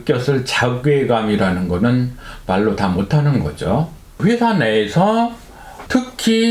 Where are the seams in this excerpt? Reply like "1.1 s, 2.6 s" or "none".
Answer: 4.0 s

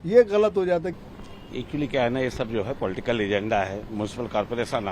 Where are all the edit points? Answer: 1.1 s

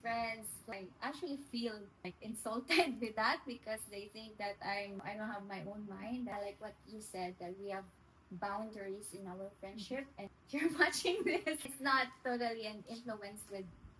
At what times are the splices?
0.7 s, 2.1 s, 5.0 s, 6.3 s, 10.3 s, 11.6 s

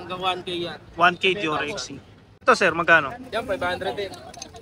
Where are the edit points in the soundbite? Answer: 2.4 s

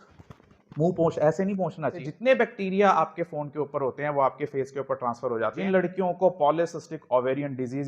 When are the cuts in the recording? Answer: 2.6 s, 5.6 s

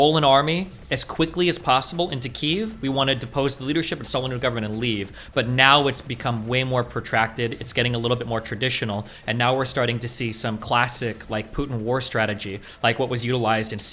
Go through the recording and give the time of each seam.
none

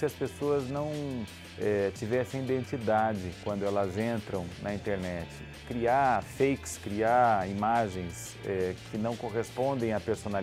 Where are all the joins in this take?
none

